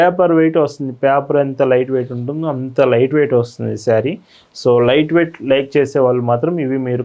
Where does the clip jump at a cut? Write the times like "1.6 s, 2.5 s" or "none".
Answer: none